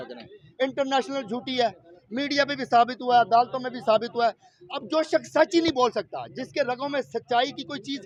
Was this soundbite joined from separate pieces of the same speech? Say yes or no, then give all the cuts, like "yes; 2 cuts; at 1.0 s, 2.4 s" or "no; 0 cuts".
no; 0 cuts